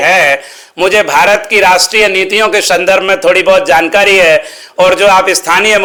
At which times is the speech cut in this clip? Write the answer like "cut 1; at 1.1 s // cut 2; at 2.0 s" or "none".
none